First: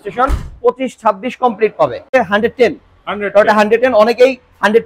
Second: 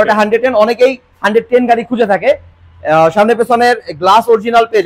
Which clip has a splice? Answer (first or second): first